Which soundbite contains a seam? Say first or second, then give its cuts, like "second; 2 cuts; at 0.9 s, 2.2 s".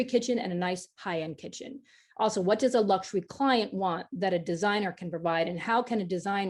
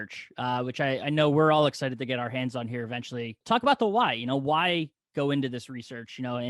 second; 1 cut; at 3.3 s